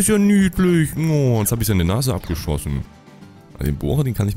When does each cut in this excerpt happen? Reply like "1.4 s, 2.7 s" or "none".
2.9 s